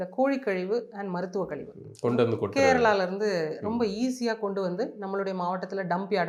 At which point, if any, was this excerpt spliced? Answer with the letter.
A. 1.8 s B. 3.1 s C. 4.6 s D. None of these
D